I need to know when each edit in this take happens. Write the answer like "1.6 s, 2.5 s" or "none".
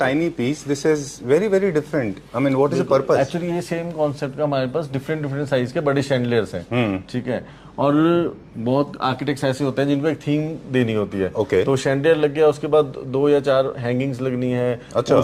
none